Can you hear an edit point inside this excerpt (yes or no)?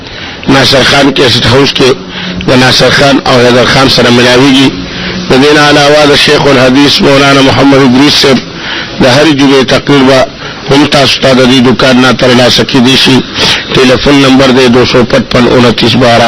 no